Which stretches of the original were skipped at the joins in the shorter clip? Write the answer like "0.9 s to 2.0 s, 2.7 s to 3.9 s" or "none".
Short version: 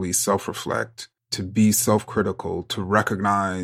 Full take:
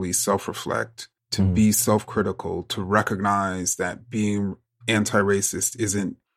none